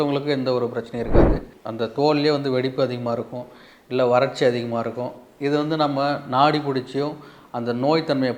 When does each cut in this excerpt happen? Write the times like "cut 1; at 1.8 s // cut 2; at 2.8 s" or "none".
cut 1; at 1.4 s